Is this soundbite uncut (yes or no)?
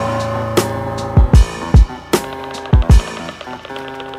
yes